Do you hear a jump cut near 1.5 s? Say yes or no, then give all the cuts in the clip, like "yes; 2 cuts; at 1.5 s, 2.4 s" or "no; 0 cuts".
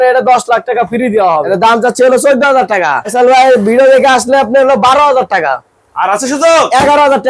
yes; 2 cuts; at 1.5 s, 3.1 s